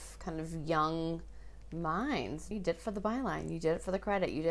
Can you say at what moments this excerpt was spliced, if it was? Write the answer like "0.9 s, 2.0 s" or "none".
2.5 s

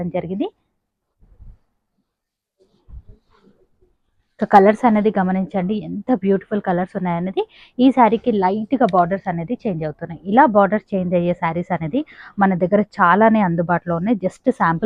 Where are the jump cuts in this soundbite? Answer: none

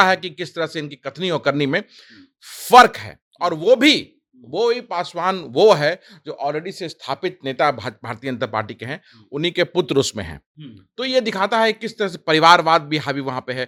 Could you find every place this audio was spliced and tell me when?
none

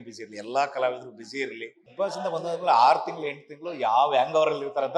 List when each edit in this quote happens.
1.8 s

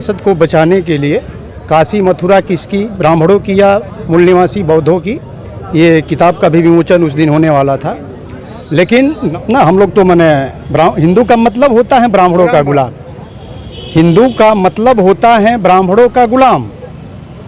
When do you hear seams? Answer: 9.2 s

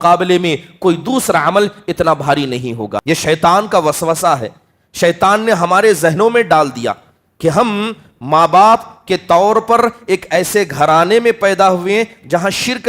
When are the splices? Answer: 3.0 s

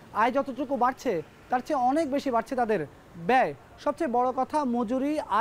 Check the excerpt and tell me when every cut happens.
none

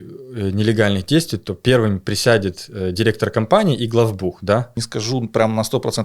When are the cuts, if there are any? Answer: 4.8 s

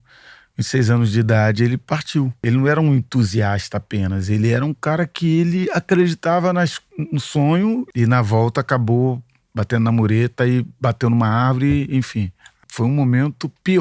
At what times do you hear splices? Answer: 2.4 s, 7.9 s, 12.5 s

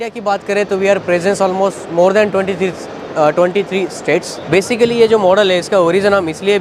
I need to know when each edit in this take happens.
4.5 s

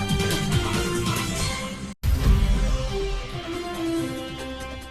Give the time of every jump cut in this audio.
none

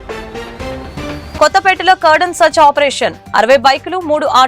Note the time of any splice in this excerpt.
1.3 s

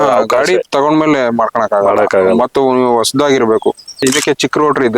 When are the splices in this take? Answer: 4.0 s

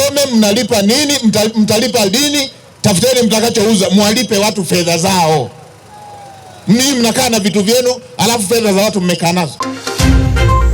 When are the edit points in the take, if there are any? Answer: 9.6 s

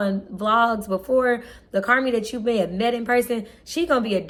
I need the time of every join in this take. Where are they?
none

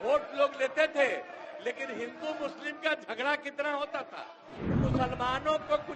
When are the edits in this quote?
4.8 s

